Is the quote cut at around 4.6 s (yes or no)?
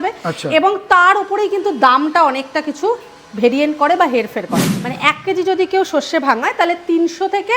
yes